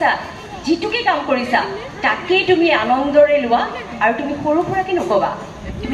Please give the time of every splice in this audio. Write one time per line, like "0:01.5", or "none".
none